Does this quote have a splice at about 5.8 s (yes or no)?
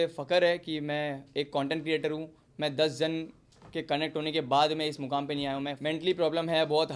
yes